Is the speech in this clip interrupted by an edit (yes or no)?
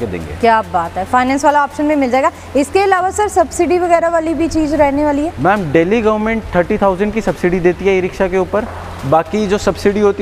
no